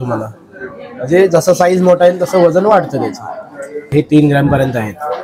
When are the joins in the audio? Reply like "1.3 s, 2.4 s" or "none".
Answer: 3.7 s

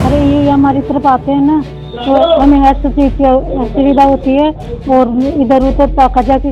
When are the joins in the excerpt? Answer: none

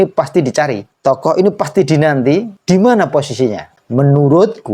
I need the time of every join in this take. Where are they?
0.9 s, 2.5 s, 3.8 s

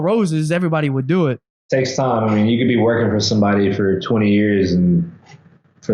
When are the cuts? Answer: 1.6 s

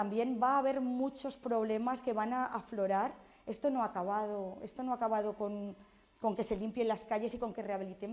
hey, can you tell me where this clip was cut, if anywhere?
none

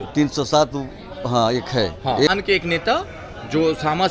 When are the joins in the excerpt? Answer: 2.3 s

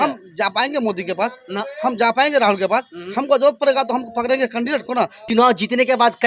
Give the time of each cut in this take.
5.2 s

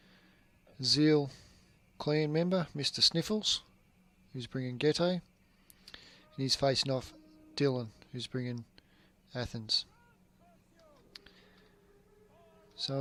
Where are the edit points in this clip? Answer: none

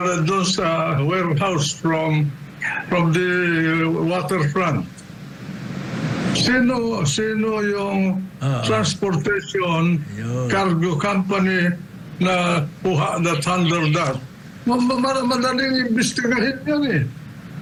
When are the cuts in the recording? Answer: none

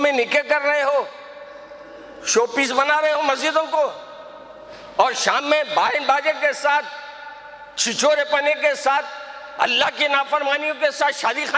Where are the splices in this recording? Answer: none

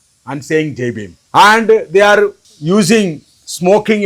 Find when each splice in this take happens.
1.1 s, 2.5 s

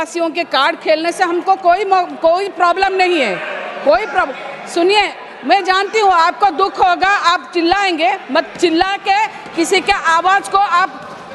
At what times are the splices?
none

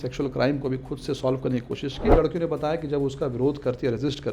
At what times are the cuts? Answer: 2.1 s

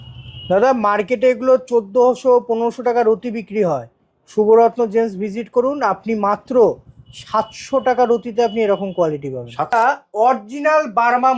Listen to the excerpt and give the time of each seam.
9.7 s

